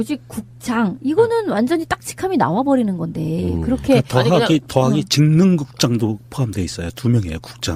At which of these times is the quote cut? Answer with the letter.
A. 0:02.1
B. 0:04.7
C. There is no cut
C